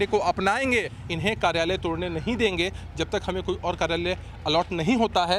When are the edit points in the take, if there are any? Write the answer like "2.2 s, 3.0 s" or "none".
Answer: 1.0 s